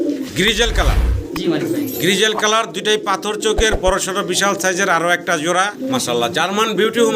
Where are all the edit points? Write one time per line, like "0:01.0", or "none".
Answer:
0:05.7